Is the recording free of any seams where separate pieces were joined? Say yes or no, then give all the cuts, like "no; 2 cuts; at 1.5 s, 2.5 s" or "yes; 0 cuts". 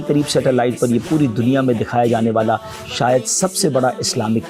yes; 0 cuts